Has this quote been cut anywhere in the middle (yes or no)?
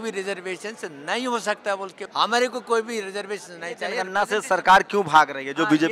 yes